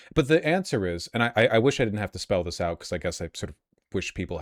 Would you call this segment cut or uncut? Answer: uncut